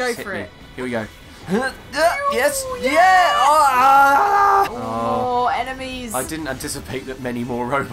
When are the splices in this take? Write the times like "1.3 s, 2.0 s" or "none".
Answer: 4.7 s